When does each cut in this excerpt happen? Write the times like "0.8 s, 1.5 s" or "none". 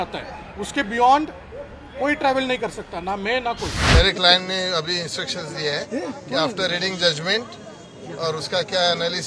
3.8 s